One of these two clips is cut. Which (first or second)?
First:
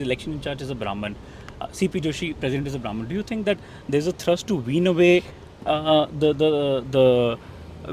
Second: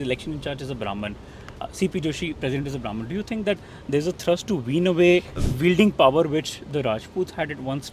second